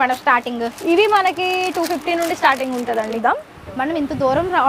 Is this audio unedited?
no; 1 cut; at 3.2 s

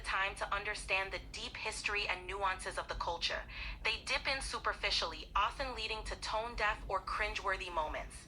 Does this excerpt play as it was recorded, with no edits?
yes; 0 cuts

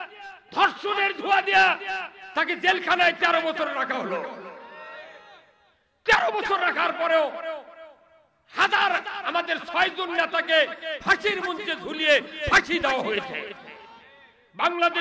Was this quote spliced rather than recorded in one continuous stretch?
no; 0 cuts

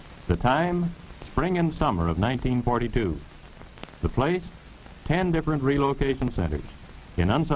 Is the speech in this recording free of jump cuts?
no; 1 cut; at 5.0 s

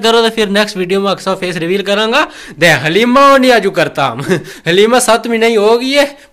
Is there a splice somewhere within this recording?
no; 0 cuts

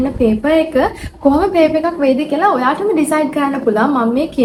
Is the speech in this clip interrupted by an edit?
no; 0 cuts

